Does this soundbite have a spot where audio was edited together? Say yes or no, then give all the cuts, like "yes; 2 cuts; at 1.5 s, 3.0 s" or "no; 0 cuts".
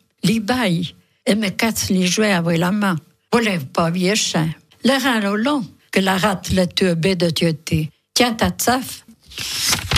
yes; 2 cuts; at 4.6 s, 9.1 s